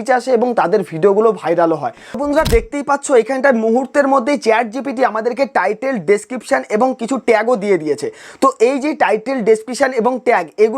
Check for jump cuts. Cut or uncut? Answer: cut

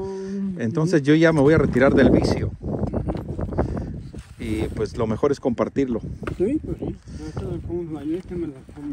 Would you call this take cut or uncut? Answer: uncut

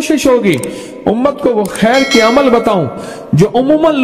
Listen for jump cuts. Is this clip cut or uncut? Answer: uncut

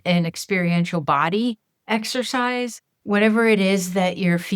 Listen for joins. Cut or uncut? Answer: cut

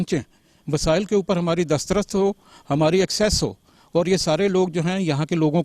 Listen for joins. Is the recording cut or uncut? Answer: uncut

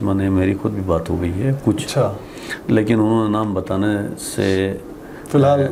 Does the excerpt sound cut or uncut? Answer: uncut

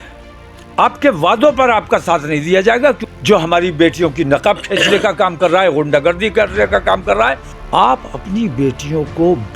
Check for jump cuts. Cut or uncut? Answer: cut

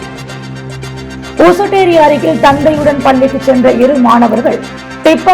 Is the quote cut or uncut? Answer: cut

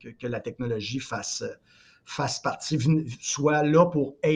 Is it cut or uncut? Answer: uncut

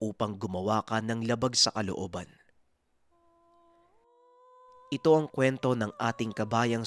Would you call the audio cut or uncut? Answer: cut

